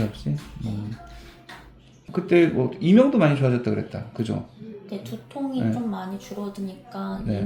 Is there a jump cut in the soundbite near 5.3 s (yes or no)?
no